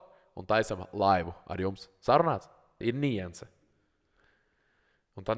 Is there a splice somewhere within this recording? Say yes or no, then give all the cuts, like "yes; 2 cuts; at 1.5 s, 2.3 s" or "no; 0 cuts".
yes; 1 cut; at 2.8 s